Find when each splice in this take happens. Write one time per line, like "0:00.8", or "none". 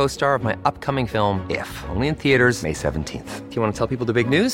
none